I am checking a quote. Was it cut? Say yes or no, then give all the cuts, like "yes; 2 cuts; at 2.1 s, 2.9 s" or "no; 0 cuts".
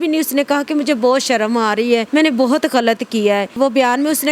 yes; 1 cut; at 2.1 s